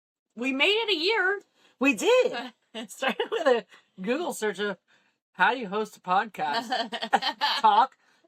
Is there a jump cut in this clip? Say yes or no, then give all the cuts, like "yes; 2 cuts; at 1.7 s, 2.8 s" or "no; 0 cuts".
no; 0 cuts